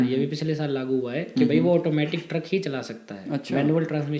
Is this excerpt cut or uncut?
uncut